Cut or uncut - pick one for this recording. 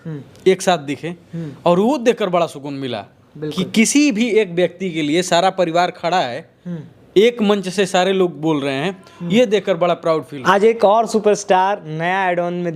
cut